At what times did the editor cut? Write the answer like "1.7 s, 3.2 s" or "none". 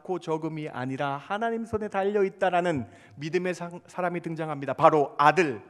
none